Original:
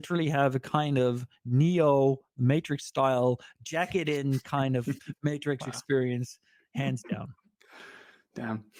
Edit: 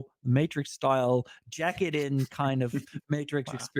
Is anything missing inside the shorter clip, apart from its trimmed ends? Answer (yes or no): no